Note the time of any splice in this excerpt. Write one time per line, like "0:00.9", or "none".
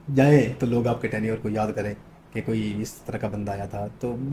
none